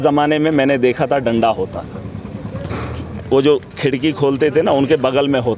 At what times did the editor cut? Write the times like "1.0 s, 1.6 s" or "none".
none